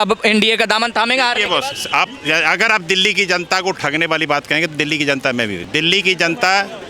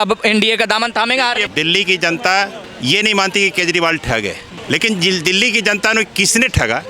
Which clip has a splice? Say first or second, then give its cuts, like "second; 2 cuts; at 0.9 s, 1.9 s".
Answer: second; 3 cuts; at 1.5 s, 2.6 s, 4.5 s